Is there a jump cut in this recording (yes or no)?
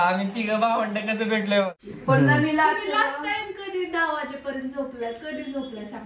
yes